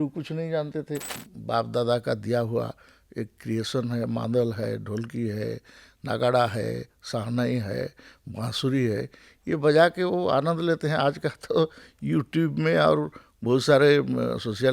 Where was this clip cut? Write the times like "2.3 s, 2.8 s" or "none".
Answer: 1.2 s

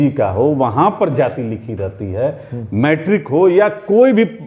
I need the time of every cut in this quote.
none

